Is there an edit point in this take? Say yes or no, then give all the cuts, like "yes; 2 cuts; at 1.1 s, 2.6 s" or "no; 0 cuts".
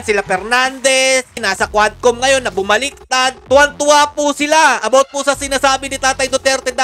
yes; 1 cut; at 1.4 s